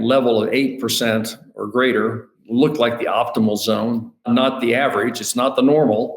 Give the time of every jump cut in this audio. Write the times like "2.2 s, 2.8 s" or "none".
2.3 s, 4.3 s